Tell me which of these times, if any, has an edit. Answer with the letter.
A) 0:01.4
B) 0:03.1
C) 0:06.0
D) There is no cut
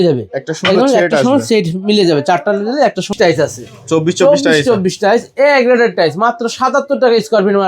B